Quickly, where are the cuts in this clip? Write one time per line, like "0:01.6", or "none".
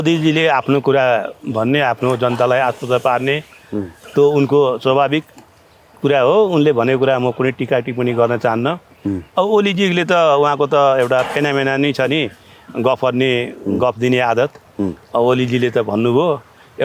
none